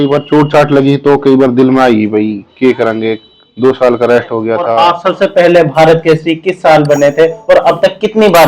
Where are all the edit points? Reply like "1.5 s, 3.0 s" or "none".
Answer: 4.7 s